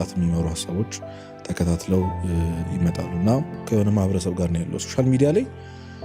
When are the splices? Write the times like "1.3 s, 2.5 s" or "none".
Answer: 3.6 s